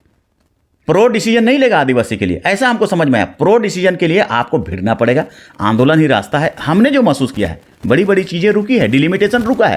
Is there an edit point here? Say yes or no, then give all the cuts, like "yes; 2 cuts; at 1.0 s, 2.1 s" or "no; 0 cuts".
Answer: no; 0 cuts